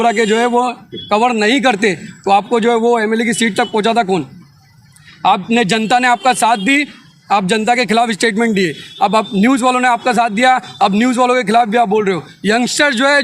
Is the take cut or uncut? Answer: uncut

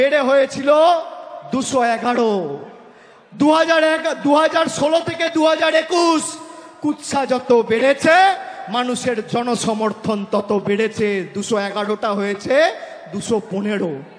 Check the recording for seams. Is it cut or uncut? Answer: uncut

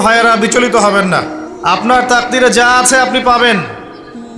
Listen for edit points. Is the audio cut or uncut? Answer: cut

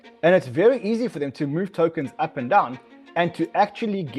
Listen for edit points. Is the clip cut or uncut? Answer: uncut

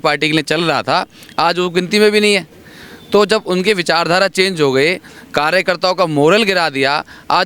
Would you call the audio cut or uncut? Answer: uncut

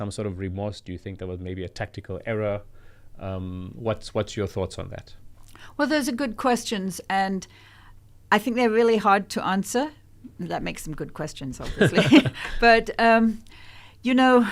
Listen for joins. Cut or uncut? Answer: uncut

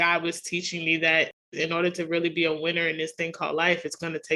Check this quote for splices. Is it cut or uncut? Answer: cut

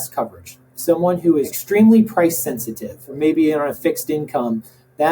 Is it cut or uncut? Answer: cut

